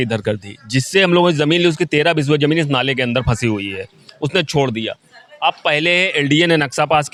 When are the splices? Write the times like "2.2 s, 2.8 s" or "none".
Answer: none